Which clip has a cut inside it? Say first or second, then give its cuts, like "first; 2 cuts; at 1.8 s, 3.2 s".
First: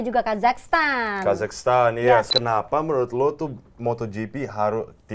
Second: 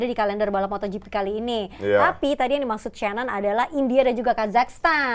first; 1 cut; at 2.3 s